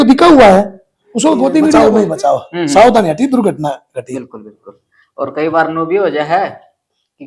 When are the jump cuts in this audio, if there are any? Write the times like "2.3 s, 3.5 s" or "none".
1.8 s